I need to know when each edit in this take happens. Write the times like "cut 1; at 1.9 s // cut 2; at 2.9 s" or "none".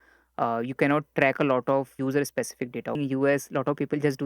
cut 1; at 2.0 s // cut 2; at 3.0 s